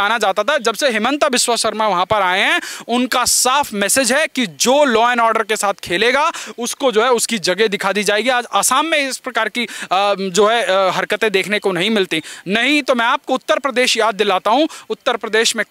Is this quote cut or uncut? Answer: uncut